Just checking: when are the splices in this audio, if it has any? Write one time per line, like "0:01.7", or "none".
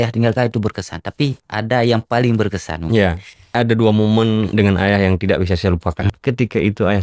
0:03.5
0:04.5
0:06.1

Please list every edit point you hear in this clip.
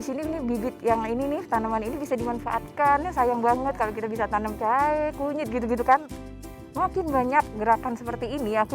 0:06.3

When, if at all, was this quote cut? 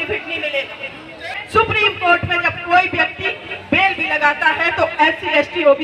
0:01.4

